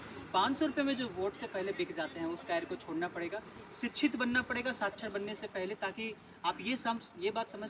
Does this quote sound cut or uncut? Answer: uncut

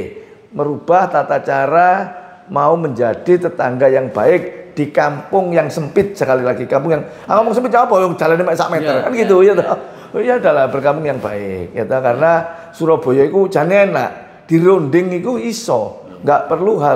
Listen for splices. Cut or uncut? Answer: uncut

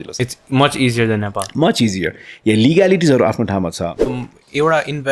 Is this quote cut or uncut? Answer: cut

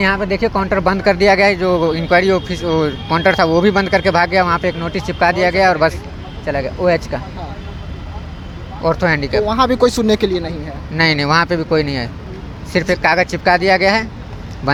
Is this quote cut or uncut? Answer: uncut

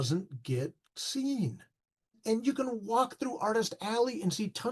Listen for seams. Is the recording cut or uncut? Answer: cut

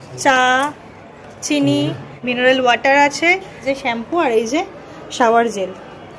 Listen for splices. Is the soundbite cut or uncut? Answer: cut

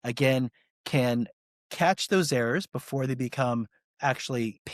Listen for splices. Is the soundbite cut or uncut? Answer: uncut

